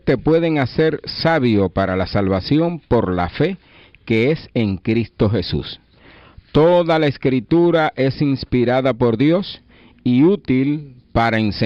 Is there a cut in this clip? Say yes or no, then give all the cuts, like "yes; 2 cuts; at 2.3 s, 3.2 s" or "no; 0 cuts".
no; 0 cuts